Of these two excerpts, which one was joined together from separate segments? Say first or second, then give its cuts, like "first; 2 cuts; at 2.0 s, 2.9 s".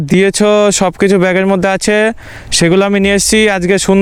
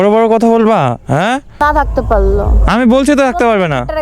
second; 1 cut; at 1.6 s